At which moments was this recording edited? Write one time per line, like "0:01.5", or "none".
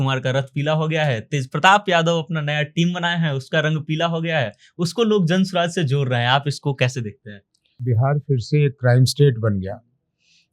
0:07.8